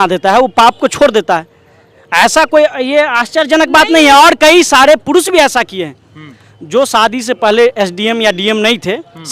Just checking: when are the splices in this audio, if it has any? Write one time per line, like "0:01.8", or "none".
none